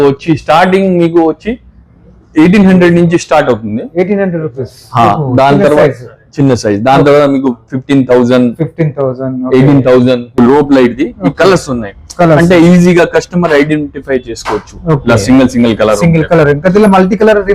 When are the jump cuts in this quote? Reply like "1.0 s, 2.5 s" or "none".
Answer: 10.3 s